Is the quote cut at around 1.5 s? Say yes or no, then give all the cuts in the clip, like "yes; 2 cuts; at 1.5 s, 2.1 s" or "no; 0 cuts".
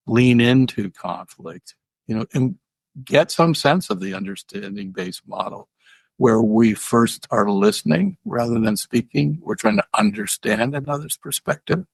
no; 0 cuts